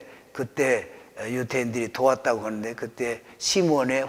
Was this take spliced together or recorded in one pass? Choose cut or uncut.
uncut